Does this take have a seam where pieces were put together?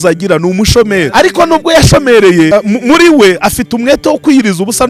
yes; 2 cuts; at 1.1 s, 2.5 s

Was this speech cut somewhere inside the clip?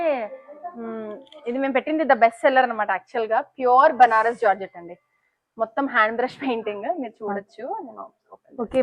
no; 0 cuts

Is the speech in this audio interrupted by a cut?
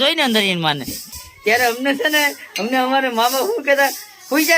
yes; 1 cut; at 1.1 s

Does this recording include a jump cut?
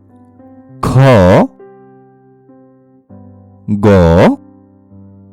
yes; 3 cuts; at 1.5 s, 3.6 s, 4.4 s

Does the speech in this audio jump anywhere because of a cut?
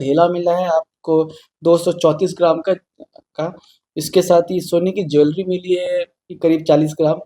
no; 0 cuts

